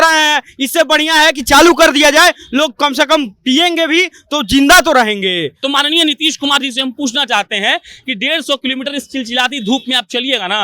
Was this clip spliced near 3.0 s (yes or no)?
no